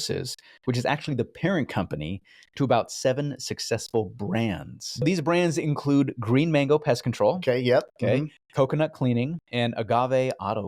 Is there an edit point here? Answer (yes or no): yes